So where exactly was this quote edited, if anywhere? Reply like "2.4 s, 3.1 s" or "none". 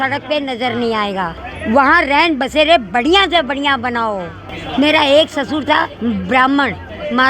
4.3 s